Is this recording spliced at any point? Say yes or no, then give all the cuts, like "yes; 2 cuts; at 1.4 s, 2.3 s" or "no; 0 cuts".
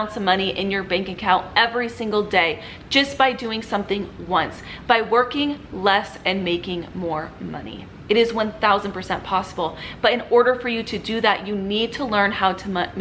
no; 0 cuts